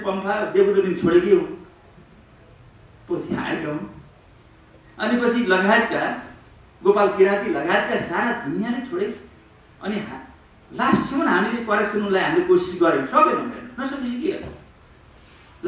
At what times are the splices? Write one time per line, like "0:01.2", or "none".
none